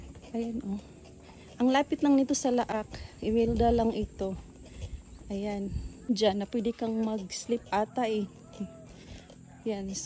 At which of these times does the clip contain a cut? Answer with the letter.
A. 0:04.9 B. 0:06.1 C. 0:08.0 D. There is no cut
B